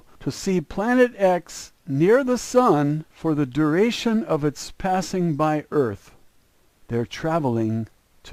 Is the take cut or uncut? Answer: uncut